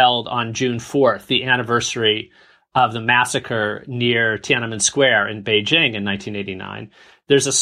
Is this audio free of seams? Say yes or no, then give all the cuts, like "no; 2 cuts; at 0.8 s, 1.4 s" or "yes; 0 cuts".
yes; 0 cuts